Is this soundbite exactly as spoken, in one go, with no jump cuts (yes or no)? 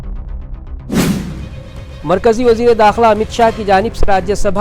yes